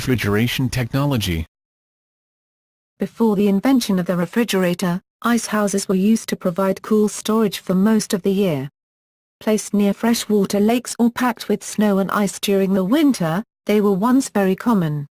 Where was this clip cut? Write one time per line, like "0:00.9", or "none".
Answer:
0:06.6